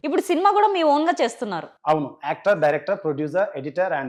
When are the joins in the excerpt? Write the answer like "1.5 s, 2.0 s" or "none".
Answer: none